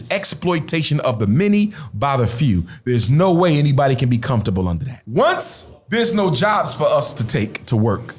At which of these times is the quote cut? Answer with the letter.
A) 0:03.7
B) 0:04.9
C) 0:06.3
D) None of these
B